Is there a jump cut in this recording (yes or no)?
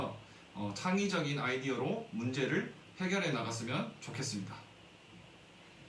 no